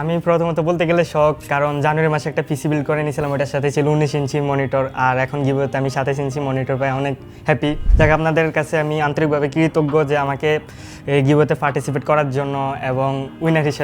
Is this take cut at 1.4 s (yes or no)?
yes